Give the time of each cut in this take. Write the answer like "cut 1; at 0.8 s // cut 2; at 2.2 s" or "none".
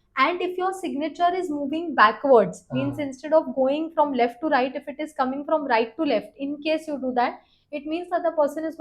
none